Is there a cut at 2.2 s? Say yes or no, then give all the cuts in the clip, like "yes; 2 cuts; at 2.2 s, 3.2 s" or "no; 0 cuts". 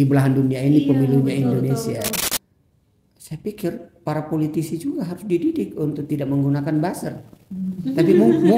yes; 1 cut; at 2.2 s